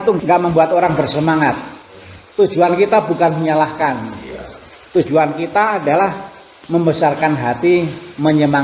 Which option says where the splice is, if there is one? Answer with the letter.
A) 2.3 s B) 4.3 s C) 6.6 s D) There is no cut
D